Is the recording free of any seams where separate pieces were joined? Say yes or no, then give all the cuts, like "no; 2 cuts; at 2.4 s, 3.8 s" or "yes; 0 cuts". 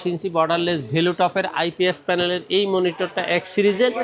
yes; 0 cuts